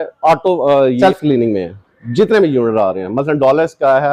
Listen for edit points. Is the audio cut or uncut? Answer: cut